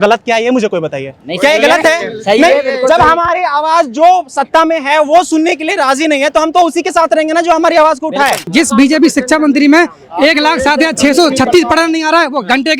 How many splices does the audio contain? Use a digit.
1